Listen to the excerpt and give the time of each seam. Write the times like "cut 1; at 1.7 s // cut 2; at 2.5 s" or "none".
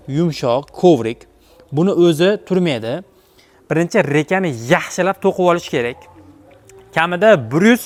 none